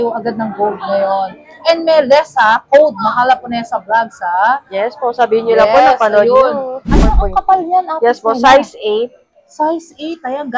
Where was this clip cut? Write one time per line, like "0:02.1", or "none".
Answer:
0:07.1